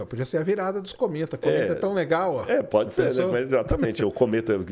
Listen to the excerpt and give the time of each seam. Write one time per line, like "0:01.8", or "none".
none